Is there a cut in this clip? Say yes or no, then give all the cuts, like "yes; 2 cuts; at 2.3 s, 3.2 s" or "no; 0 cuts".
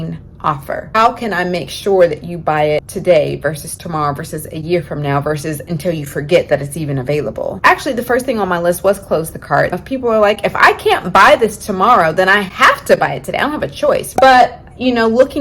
yes; 5 cuts; at 1.0 s, 2.9 s, 7.6 s, 9.7 s, 14.1 s